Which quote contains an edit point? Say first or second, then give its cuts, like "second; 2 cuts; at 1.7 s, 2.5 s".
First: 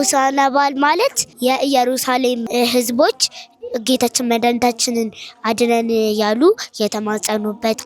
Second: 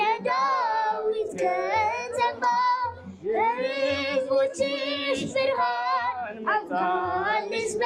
first; 2 cuts; at 1.3 s, 2.4 s